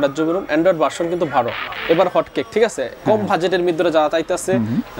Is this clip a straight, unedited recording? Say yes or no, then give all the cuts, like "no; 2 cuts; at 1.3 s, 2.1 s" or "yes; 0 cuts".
no; 1 cut; at 1.8 s